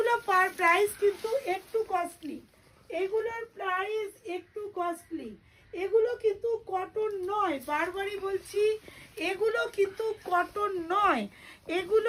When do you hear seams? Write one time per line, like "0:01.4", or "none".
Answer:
none